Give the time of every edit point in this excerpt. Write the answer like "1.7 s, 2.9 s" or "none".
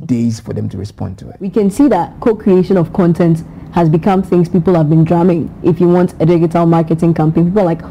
1.5 s